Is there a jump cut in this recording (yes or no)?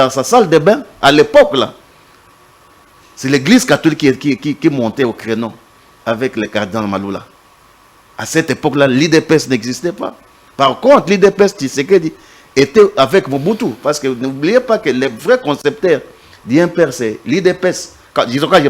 no